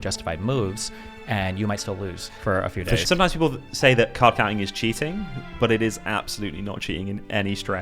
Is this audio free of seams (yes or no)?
no